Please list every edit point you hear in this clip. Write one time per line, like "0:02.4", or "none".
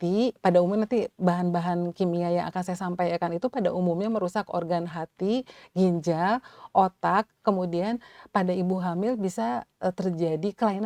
none